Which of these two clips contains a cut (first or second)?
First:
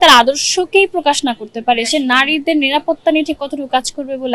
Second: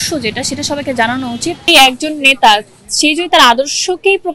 second